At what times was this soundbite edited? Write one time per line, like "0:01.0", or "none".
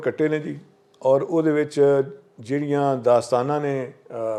none